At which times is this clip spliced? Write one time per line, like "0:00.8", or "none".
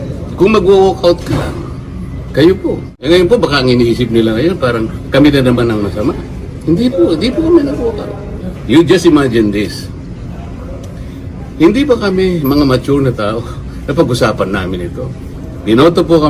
0:02.9